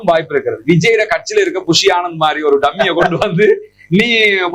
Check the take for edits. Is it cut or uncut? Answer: uncut